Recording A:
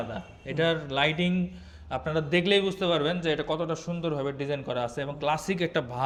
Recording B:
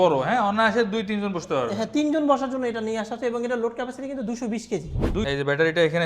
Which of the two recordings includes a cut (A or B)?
B